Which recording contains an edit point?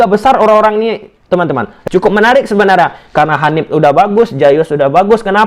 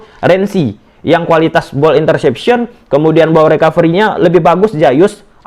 first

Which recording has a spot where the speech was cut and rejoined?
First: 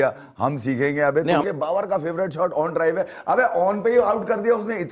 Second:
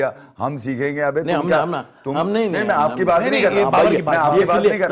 first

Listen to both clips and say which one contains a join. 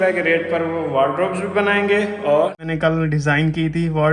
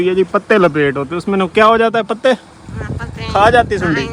first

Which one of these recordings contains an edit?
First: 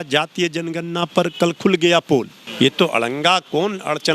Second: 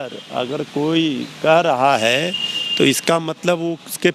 first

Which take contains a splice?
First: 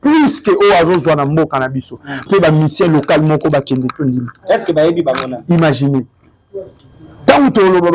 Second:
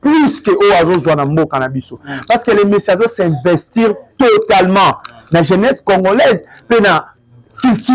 first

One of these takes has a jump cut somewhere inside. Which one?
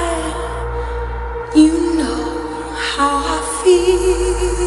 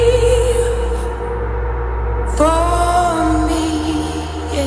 first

